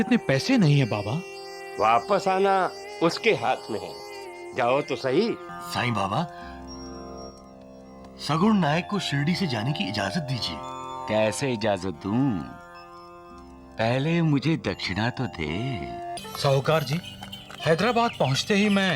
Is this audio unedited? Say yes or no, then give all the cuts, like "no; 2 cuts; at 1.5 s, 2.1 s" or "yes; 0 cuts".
no; 2 cuts; at 5.5 s, 16.2 s